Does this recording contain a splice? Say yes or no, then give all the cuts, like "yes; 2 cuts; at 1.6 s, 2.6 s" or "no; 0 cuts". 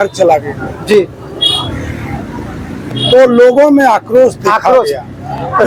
no; 0 cuts